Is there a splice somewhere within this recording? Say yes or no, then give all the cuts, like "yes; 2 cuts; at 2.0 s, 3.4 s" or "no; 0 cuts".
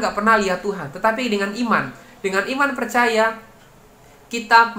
no; 0 cuts